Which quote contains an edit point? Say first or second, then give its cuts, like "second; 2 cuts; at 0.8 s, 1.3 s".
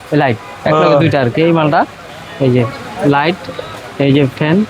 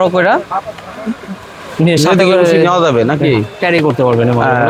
first; 1 cut; at 2.0 s